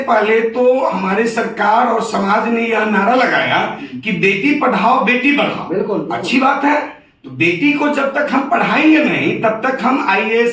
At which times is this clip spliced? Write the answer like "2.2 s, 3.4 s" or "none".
none